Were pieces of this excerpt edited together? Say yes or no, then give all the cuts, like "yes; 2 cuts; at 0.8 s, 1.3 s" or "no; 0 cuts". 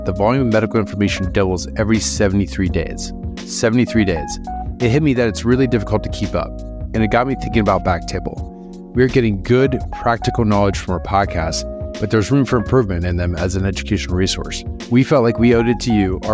no; 0 cuts